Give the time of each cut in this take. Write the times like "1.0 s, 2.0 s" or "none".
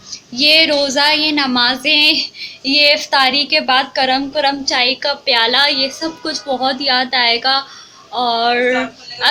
none